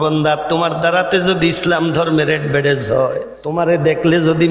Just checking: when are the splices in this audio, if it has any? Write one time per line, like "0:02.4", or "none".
0:03.3

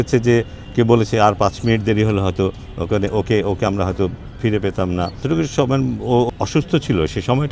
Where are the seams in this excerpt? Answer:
0:05.2
0:06.3

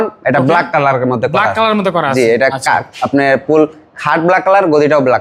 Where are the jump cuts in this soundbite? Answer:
none

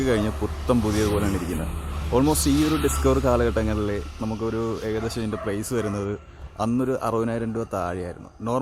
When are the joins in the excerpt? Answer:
none

